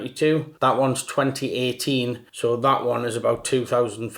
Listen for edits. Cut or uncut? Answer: uncut